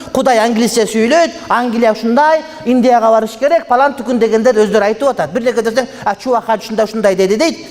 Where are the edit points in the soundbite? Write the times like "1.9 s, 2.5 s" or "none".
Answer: none